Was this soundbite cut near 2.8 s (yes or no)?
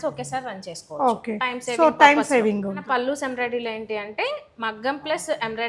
yes